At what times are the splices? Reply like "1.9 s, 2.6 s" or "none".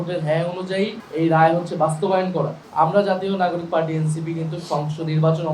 1.0 s, 2.6 s